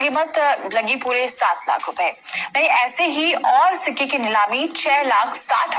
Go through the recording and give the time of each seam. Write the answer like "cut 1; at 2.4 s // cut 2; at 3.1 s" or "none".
none